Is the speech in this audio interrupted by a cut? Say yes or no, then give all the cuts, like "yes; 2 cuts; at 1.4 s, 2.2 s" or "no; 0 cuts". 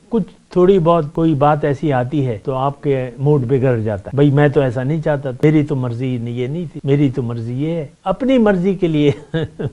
yes; 6 cuts; at 1.1 s, 2.4 s, 4.0 s, 5.3 s, 6.7 s, 7.9 s